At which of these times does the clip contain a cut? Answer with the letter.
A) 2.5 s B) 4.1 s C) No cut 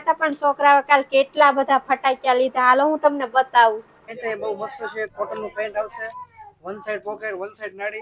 B